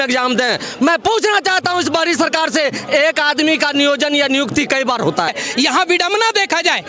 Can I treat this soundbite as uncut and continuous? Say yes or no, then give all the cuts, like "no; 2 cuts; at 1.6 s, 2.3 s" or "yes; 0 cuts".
no; 1 cut; at 5.3 s